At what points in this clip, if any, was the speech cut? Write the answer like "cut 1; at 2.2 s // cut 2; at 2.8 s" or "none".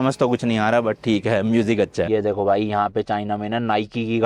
cut 1; at 2.1 s